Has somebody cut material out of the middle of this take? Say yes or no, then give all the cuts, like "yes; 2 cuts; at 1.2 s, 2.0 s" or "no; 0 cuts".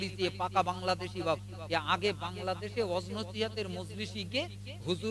no; 0 cuts